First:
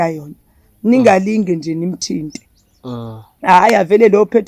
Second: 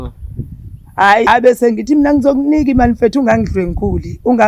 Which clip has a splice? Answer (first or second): second